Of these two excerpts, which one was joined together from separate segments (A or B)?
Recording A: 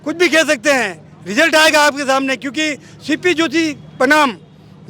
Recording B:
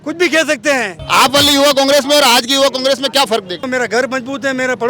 B